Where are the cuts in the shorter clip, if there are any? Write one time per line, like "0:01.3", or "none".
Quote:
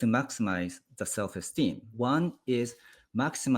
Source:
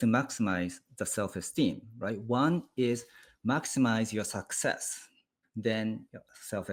0:01.9